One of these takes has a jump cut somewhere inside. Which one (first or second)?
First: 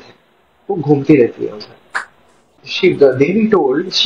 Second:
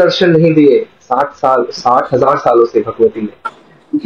first